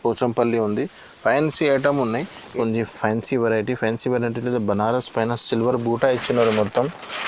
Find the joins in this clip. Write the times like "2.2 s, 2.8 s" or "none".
2.5 s